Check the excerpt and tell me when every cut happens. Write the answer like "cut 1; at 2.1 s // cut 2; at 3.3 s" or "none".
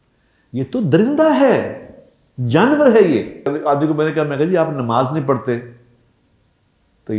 cut 1; at 3.5 s

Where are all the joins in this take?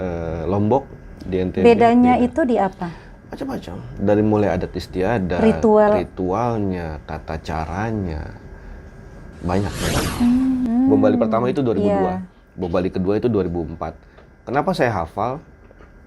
cut 1; at 10.6 s

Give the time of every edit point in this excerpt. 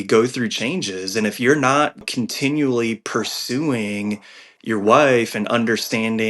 cut 1; at 2.1 s

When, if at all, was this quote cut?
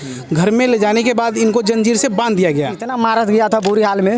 cut 1; at 2.9 s

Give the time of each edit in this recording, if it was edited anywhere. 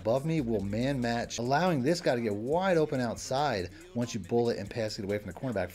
cut 1; at 1.3 s

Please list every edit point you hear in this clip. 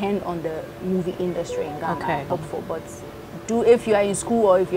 cut 1; at 2.3 s

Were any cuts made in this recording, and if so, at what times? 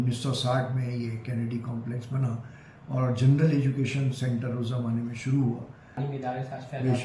cut 1; at 6.0 s

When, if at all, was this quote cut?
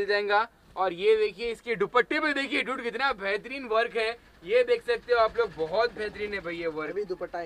none

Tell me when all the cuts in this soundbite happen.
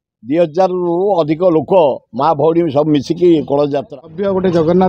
cut 1; at 3.9 s

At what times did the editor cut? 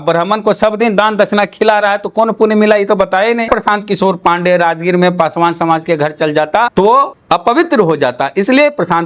cut 1; at 3.5 s // cut 2; at 6.8 s

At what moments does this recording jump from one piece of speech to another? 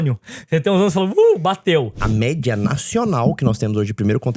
cut 1; at 2.0 s

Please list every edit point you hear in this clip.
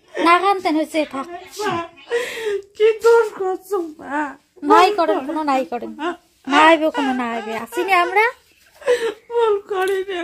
none

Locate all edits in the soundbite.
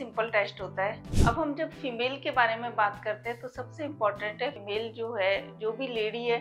cut 1; at 1.1 s // cut 2; at 4.6 s

